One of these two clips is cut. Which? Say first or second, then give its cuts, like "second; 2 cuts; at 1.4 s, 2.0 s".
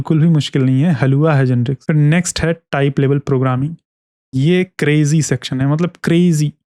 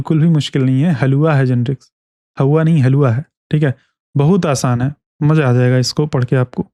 first; 1 cut; at 1.8 s